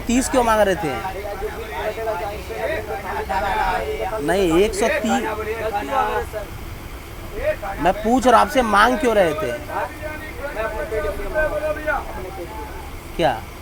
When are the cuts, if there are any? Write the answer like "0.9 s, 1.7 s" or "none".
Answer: none